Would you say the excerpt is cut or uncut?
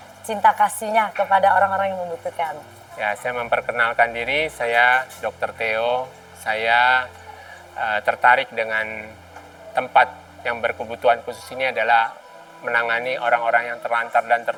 uncut